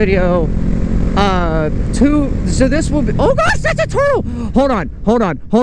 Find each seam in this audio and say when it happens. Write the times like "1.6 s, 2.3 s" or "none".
none

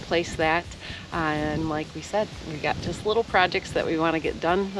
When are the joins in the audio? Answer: none

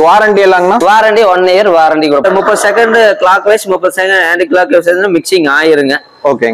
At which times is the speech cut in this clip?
2.2 s

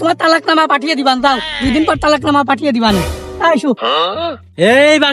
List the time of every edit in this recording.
4.0 s

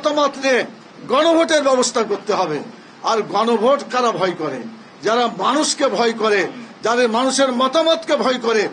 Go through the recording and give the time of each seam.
none

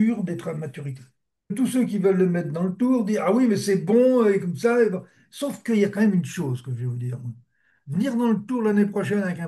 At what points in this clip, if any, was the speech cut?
1.5 s

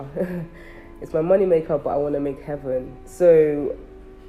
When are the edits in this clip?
none

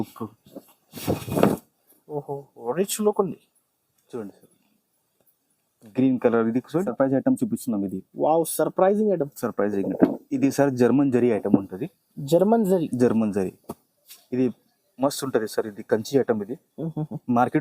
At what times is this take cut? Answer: 6.9 s

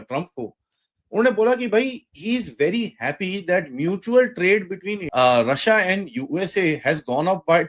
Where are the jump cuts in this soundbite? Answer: 5.0 s

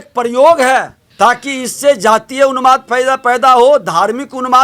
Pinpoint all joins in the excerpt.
1.0 s

